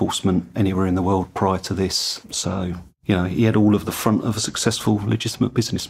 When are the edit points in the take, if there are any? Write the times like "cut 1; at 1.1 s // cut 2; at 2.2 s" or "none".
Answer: cut 1; at 4.0 s